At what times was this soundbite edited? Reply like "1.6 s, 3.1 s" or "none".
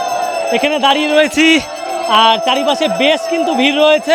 none